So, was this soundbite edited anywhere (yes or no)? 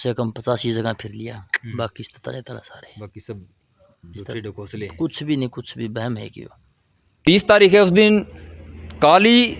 yes